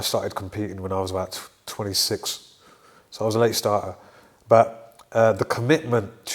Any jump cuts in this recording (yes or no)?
no